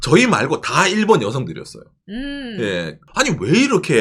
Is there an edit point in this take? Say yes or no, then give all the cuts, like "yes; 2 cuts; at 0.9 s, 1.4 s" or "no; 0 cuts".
yes; 1 cut; at 3.0 s